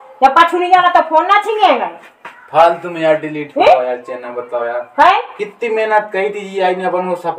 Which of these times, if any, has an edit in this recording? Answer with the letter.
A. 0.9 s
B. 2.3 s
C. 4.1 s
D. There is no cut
D